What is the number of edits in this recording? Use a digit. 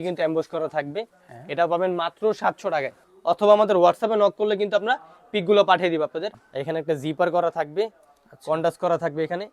2